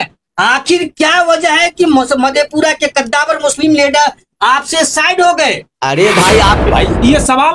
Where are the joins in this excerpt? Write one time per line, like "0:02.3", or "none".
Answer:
0:06.6